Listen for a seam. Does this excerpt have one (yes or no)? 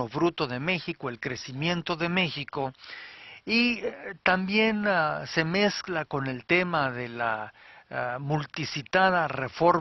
no